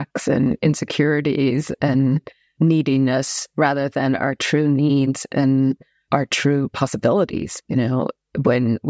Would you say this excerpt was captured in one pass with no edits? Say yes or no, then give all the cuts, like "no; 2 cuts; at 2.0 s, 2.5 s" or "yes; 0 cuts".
yes; 0 cuts